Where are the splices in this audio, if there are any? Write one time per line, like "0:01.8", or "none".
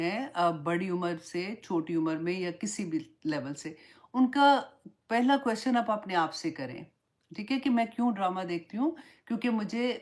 none